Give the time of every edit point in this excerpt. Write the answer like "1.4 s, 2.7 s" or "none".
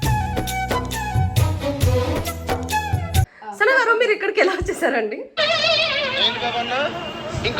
3.3 s, 5.2 s